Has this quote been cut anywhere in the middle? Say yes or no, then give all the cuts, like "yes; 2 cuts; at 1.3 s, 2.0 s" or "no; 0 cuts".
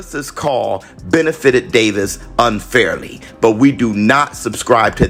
no; 0 cuts